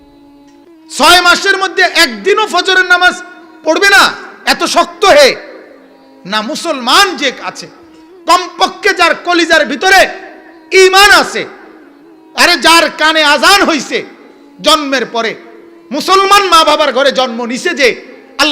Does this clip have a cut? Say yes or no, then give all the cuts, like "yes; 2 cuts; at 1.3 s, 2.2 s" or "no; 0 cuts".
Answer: yes; 1 cut; at 1.0 s